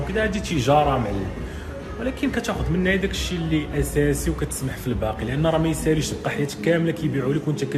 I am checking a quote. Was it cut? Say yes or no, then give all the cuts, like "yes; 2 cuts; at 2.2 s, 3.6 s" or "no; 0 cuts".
no; 0 cuts